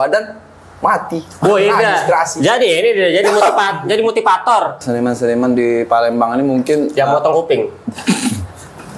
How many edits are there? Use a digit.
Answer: 1